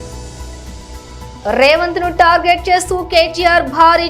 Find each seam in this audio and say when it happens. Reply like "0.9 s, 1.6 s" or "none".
none